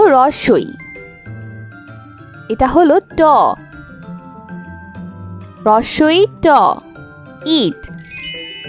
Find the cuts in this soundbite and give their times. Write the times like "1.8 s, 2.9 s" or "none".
none